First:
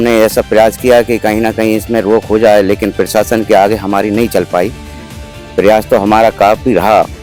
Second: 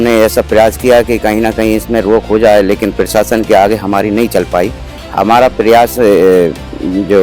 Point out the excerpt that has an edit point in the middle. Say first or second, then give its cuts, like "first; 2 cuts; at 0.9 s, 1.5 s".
second; 1 cut; at 5.0 s